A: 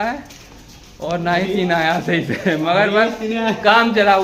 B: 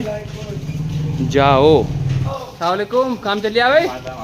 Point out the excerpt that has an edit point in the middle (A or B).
B